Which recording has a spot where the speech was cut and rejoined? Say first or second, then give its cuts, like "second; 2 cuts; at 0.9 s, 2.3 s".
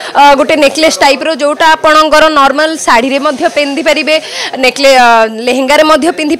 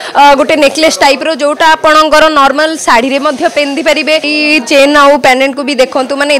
second; 1 cut; at 4.3 s